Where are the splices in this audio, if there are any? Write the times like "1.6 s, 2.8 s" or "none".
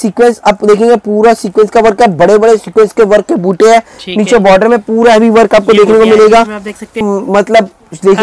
7.0 s